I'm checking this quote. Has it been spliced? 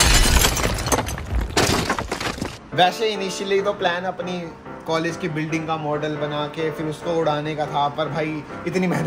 yes; 1 cut; at 2.6 s

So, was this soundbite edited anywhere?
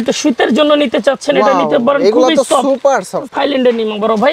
yes; 1 cut; at 3.3 s

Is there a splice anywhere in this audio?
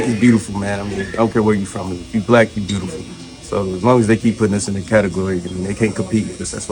no; 0 cuts

